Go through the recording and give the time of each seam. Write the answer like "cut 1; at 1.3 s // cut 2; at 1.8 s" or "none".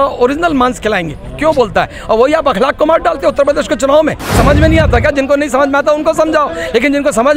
cut 1; at 4.2 s